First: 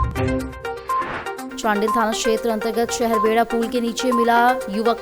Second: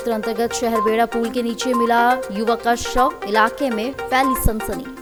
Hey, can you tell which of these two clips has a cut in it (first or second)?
first